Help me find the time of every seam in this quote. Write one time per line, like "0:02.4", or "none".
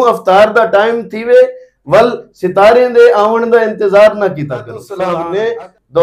0:05.0